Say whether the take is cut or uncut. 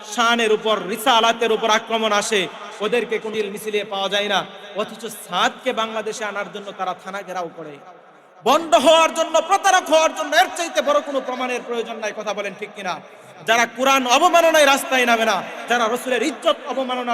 cut